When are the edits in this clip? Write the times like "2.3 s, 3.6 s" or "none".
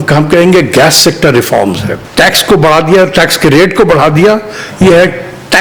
2.0 s